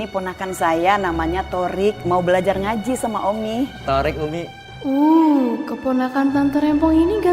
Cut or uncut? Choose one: cut